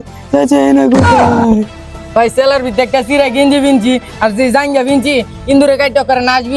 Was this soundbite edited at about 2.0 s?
yes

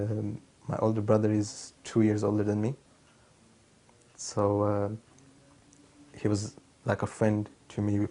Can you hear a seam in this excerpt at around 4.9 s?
no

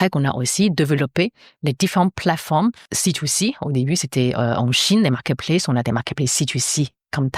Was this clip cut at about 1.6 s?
no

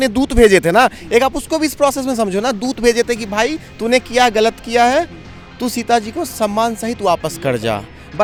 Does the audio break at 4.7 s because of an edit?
no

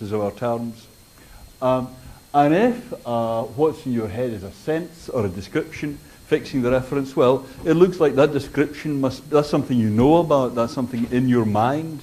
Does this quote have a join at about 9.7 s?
yes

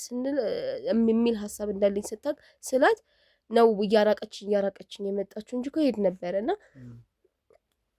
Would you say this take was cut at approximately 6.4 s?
no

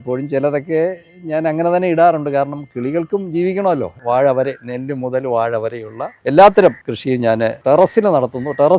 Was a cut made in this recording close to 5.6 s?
no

